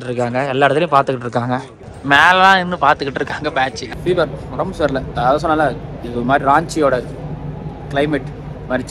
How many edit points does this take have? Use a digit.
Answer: 2